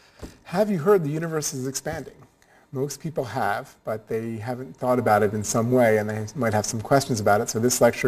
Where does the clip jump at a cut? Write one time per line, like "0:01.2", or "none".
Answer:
0:02.9